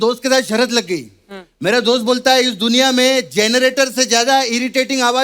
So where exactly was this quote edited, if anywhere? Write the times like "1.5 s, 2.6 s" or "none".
none